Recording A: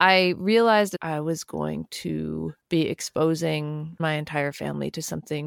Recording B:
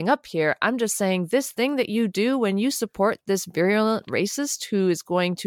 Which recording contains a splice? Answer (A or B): A